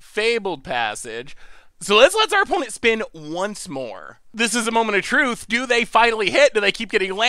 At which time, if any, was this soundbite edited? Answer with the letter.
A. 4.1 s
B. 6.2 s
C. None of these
A